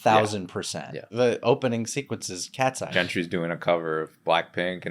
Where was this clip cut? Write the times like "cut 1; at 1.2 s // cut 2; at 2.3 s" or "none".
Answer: cut 1; at 1.1 s // cut 2; at 2.8 s

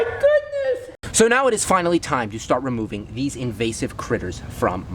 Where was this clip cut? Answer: cut 1; at 0.9 s

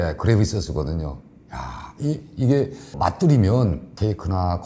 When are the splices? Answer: cut 1; at 2.9 s

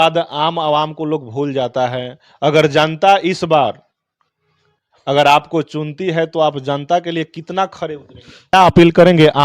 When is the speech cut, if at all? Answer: cut 1; at 8.5 s

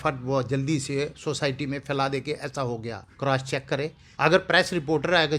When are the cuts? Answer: cut 1; at 3.1 s // cut 2; at 4.0 s

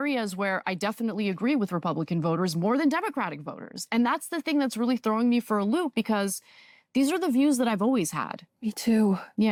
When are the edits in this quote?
none

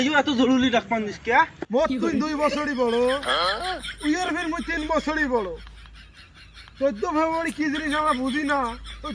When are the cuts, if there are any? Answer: cut 1; at 1.6 s

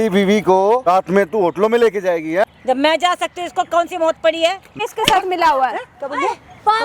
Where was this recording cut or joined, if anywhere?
cut 1; at 0.9 s // cut 2; at 2.4 s // cut 3; at 4.8 s

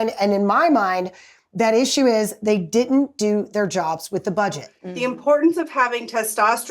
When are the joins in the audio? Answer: cut 1; at 4.8 s

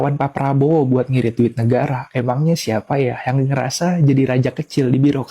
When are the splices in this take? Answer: cut 1; at 3.2 s

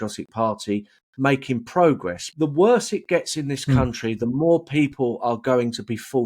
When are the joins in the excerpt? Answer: cut 1; at 2.2 s

